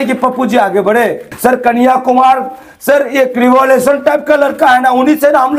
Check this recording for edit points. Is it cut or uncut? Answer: cut